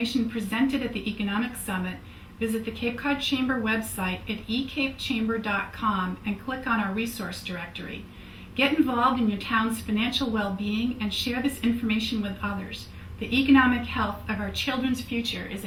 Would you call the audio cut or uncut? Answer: uncut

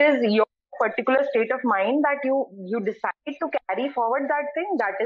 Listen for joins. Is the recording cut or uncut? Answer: uncut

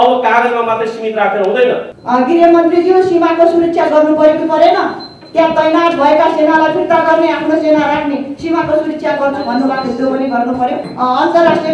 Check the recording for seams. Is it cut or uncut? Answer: cut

